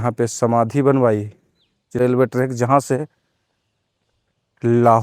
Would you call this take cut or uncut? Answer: cut